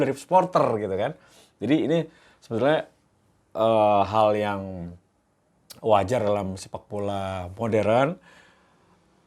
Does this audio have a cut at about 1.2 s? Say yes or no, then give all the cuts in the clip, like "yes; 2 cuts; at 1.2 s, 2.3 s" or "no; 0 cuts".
no; 0 cuts